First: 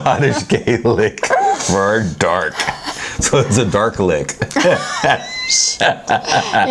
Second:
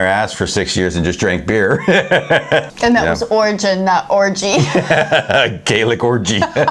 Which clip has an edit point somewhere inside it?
second; 1 cut; at 2.7 s

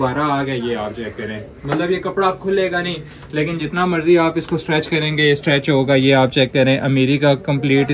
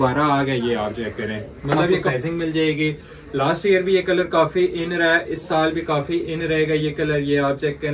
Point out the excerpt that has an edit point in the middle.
second; 1 cut; at 2.1 s

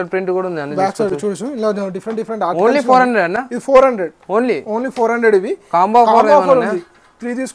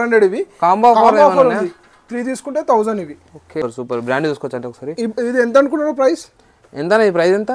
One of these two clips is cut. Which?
second; 1 cut; at 3.6 s

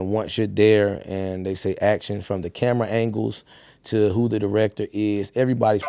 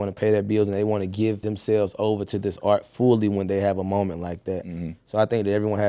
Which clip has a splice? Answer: second; 1 cut; at 1.4 s

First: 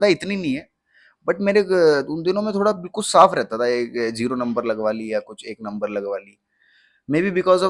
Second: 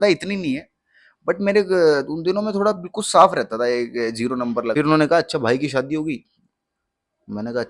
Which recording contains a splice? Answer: second; 1 cut; at 4.7 s

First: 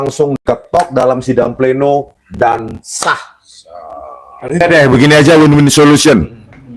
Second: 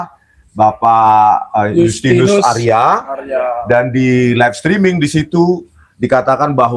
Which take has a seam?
first; 1 cut; at 4.6 s

